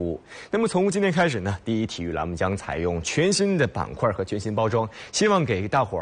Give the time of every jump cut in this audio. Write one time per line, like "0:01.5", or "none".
0:02.3